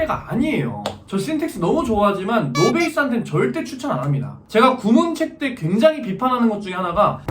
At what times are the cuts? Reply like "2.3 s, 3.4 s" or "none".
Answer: 0.9 s, 4.3 s